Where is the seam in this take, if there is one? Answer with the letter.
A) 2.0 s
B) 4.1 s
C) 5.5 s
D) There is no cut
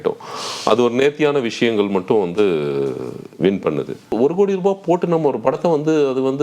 B